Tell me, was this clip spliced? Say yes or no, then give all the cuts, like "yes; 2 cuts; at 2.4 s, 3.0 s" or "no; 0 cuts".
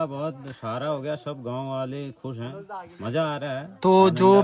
no; 0 cuts